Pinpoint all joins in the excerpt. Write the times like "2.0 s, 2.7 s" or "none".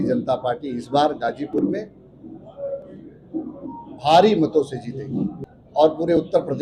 5.4 s